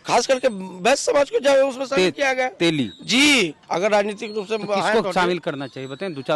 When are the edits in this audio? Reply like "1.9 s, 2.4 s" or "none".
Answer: 3.6 s